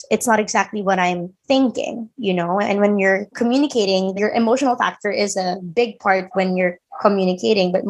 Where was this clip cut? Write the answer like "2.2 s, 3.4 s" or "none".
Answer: 3.3 s, 4.1 s